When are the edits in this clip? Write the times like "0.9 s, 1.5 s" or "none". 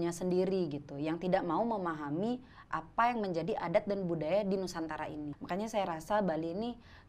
5.3 s